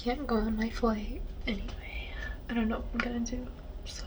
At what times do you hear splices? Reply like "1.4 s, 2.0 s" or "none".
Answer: 1.3 s